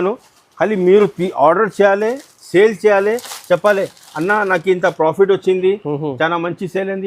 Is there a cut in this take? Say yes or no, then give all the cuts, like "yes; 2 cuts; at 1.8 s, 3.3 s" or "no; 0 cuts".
no; 0 cuts